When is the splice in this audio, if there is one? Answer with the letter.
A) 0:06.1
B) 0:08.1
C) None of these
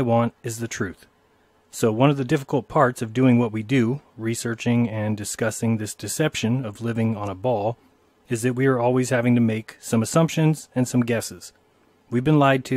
A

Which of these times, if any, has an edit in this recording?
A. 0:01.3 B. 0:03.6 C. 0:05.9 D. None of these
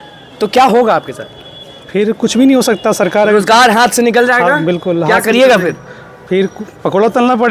D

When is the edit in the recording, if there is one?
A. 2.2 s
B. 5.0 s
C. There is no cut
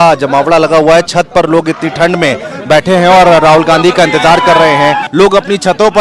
B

